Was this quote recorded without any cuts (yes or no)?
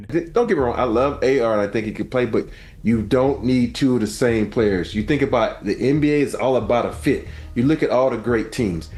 yes